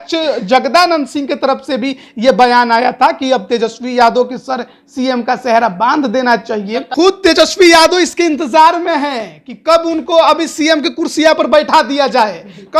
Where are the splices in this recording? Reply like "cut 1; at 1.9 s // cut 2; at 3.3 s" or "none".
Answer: cut 1; at 6.8 s